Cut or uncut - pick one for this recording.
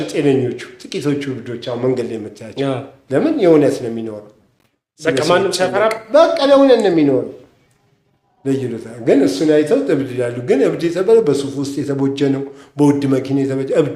uncut